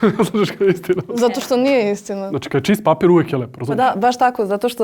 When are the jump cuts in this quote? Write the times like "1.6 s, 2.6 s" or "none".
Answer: 2.2 s, 3.7 s